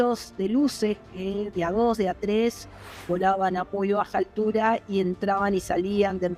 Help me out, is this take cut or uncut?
uncut